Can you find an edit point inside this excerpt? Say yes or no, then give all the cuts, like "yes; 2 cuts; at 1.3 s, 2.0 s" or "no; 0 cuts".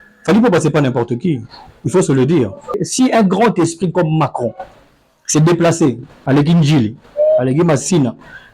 yes; 1 cut; at 2.8 s